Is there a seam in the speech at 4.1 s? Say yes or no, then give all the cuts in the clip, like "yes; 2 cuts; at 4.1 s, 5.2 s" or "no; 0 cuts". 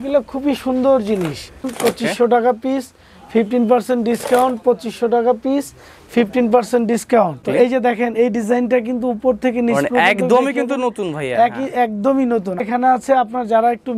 no; 3 cuts; at 1.7 s, 7.4 s, 12.6 s